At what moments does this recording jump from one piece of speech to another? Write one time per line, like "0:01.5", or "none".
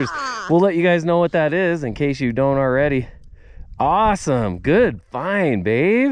none